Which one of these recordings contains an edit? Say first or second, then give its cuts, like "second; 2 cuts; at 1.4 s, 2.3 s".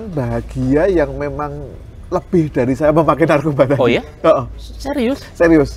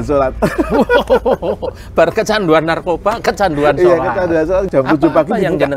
second; 1 cut; at 4.7 s